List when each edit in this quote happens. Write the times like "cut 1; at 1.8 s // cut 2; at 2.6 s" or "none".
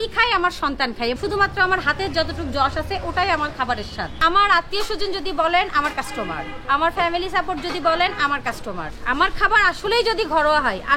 cut 1; at 1.2 s // cut 2; at 4.1 s // cut 3; at 9.0 s